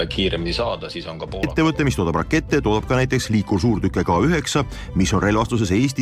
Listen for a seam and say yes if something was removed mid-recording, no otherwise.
yes